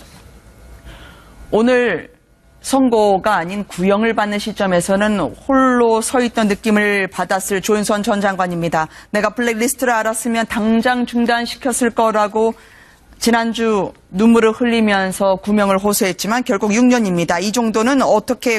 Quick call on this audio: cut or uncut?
uncut